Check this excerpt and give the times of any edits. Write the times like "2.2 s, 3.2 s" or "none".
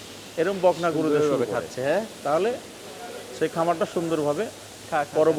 none